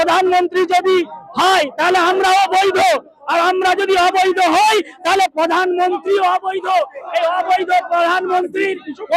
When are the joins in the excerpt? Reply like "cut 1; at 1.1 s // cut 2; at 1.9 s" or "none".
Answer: none